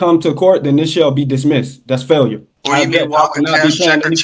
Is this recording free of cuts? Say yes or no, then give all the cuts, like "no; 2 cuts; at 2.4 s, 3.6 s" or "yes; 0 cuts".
no; 1 cut; at 2.3 s